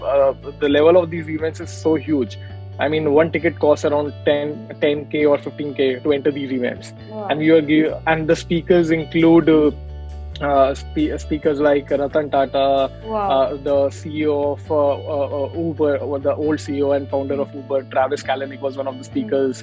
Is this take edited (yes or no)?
no